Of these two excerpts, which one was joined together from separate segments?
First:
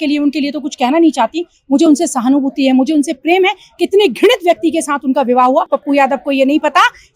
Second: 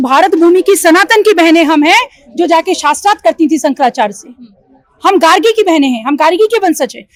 first; 1 cut; at 5.7 s

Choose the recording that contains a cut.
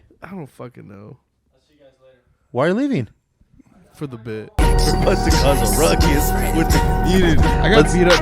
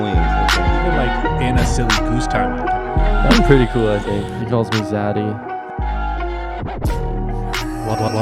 first; 1 cut; at 4.5 s

